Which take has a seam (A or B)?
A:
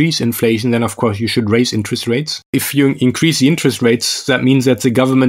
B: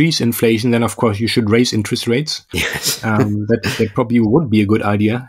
A